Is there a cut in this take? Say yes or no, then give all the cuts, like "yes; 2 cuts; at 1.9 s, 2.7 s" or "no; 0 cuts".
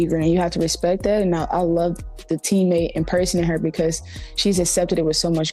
yes; 1 cut; at 1.4 s